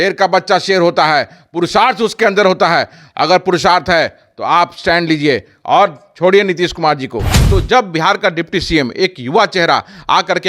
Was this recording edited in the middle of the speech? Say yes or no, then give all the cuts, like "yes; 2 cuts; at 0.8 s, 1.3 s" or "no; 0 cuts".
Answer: yes; 1 cut; at 7.3 s